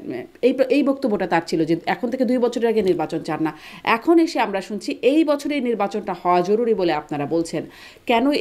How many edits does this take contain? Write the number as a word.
zero